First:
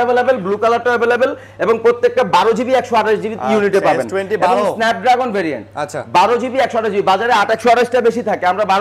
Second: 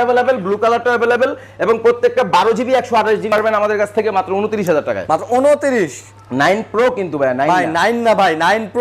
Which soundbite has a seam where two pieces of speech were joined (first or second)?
second